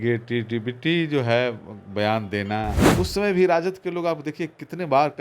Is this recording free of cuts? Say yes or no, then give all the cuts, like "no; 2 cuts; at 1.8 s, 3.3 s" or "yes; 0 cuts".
no; 1 cut; at 2.8 s